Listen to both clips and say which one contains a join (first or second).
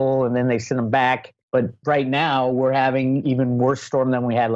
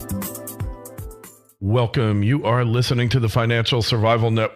second